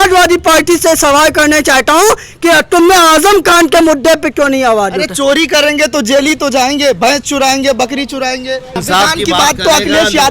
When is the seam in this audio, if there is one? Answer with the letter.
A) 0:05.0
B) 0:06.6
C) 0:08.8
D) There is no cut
C